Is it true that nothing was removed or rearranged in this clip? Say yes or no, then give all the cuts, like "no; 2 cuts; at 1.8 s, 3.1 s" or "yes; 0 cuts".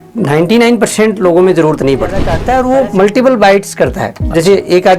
no; 1 cut; at 2.3 s